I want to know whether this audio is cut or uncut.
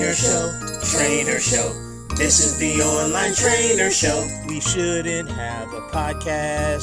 uncut